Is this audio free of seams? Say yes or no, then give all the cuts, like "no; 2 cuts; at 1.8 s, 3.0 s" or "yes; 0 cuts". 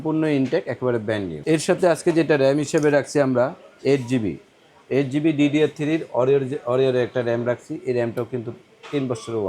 no; 1 cut; at 1.3 s